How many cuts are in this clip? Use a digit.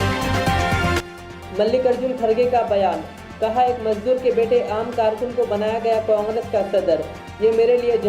1